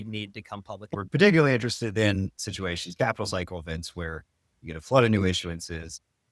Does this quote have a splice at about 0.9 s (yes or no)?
yes